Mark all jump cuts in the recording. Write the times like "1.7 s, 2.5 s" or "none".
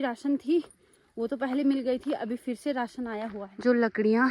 3.4 s

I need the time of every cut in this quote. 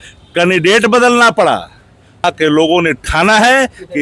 2.2 s

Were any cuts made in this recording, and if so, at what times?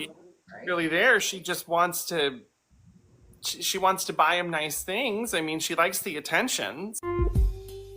6.9 s

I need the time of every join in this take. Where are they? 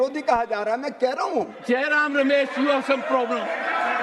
1.6 s

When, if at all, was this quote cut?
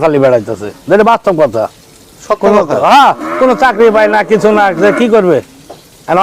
none

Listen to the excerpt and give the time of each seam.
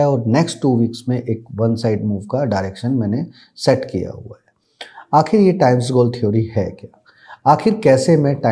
none

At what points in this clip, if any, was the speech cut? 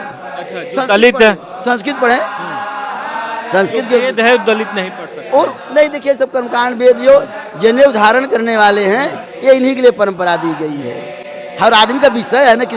none

